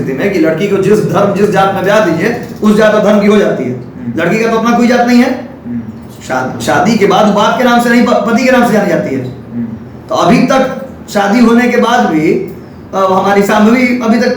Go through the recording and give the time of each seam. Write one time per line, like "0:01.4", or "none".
none